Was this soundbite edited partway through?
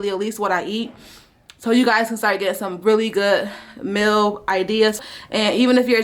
yes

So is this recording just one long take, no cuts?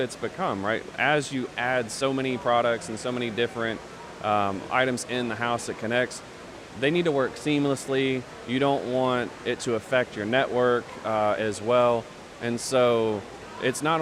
yes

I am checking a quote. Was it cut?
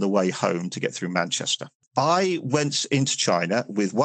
yes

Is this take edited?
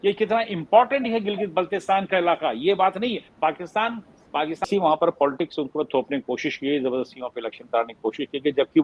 yes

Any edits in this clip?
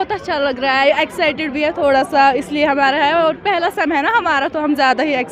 no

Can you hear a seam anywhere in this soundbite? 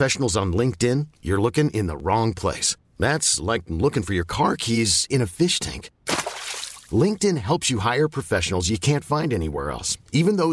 no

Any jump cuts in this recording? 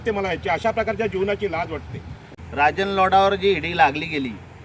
yes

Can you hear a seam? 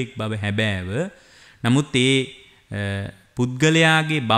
no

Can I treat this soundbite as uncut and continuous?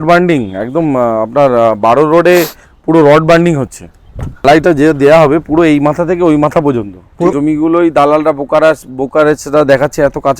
no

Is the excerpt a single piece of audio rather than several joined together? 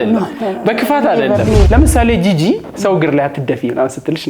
no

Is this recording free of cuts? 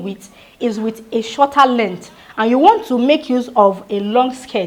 yes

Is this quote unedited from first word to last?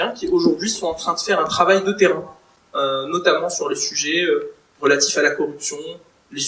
yes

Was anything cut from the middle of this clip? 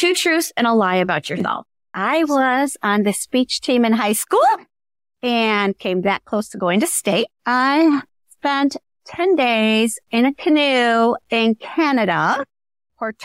yes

